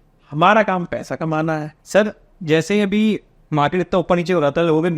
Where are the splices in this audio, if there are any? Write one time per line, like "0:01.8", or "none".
0:01.7